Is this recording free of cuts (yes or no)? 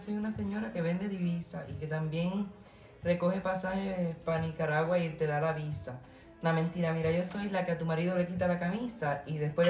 yes